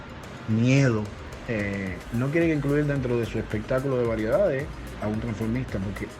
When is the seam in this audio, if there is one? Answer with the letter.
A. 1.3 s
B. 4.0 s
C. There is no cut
A